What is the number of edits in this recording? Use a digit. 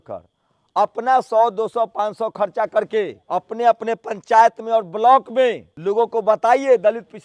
2